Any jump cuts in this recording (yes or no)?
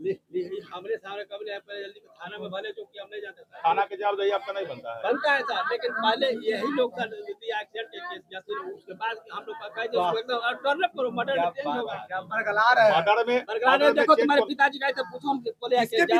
no